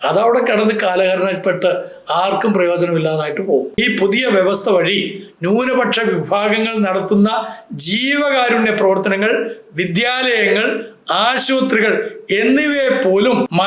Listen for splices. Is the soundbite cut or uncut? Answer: cut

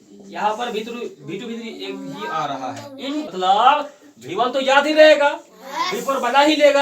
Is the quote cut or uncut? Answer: cut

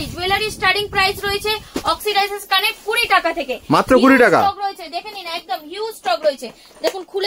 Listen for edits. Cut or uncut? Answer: uncut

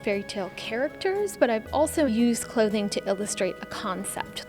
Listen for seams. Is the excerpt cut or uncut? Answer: cut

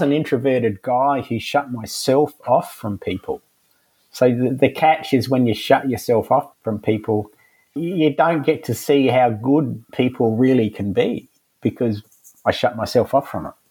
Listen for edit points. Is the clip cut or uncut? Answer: cut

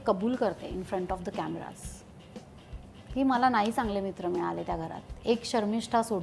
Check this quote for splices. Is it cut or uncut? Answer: uncut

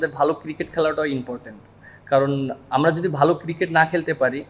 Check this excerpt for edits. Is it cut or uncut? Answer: uncut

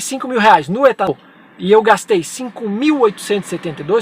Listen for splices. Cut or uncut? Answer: cut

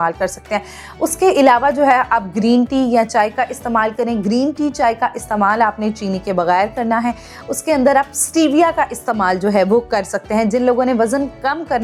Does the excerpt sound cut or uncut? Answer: uncut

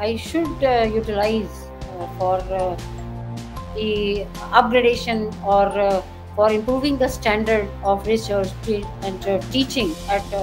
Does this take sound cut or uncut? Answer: uncut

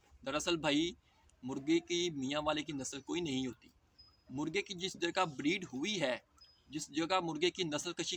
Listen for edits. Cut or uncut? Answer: uncut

